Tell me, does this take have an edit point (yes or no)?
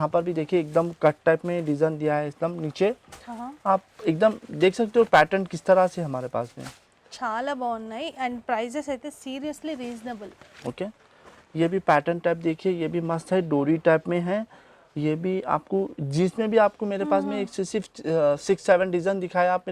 no